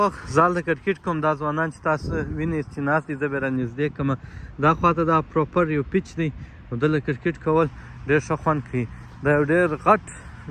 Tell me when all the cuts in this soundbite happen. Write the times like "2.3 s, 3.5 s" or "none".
none